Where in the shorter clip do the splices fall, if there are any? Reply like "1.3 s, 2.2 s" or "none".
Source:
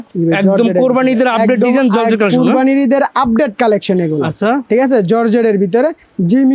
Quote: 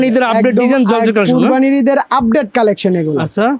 none